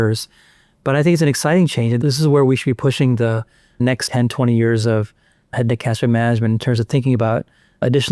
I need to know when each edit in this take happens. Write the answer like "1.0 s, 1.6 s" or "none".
2.0 s, 4.0 s, 5.5 s